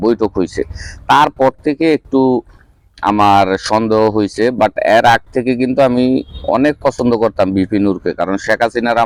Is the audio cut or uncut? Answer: uncut